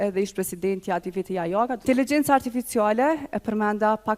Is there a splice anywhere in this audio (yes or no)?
yes